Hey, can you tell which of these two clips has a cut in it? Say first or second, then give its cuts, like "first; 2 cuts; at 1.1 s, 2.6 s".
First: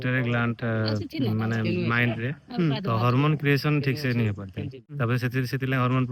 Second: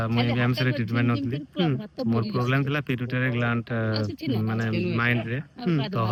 first; 1 cut; at 4.9 s